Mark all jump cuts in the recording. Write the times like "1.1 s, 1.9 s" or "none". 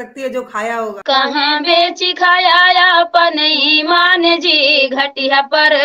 1.0 s